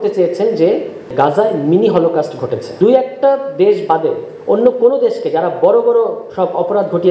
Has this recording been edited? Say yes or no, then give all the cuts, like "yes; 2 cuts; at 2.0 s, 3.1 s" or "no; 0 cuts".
yes; 2 cuts; at 1.1 s, 2.7 s